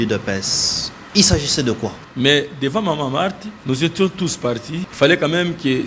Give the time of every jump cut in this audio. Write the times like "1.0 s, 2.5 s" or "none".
2.0 s, 3.5 s, 4.8 s